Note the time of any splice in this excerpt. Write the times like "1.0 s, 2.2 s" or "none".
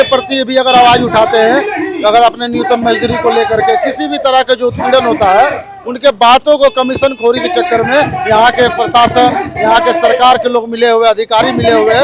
none